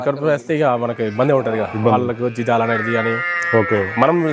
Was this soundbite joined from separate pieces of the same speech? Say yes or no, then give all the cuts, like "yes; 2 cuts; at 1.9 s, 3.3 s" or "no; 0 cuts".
no; 0 cuts